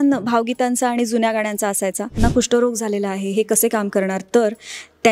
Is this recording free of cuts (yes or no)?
no